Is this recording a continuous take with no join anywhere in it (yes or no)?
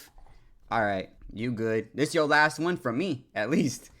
no